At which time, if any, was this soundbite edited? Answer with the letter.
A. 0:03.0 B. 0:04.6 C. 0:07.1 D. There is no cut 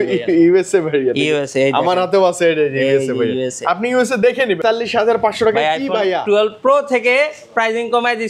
B